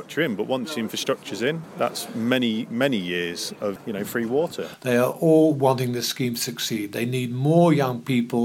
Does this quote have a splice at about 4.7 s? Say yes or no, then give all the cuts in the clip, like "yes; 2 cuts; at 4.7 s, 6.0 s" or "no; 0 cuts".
yes; 3 cuts; at 1.7 s, 3.8 s, 4.7 s